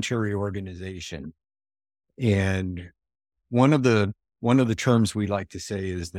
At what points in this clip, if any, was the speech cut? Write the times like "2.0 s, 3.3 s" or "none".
none